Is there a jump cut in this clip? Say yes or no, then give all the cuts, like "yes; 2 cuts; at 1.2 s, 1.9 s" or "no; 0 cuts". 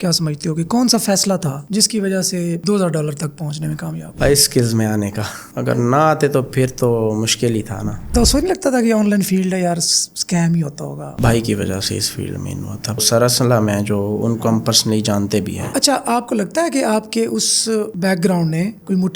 yes; 4 cuts; at 8.1 s, 11.1 s, 13.0 s, 15.6 s